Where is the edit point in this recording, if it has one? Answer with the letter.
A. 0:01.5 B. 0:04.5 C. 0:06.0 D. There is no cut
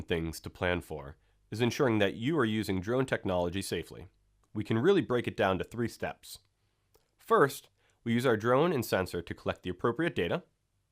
B